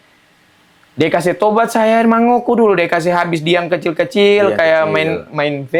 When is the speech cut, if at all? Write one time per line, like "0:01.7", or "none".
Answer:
none